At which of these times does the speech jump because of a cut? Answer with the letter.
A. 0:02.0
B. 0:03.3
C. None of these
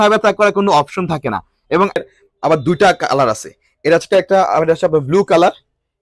A